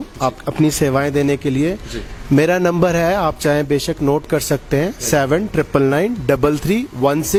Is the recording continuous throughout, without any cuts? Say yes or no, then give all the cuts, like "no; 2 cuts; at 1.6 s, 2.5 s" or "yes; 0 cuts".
yes; 0 cuts